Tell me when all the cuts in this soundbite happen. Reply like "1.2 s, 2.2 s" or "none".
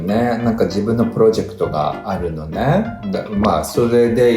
none